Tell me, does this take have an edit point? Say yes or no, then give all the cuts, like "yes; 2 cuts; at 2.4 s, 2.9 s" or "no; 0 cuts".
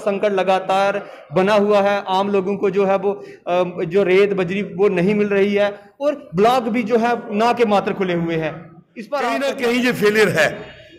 yes; 1 cut; at 9.3 s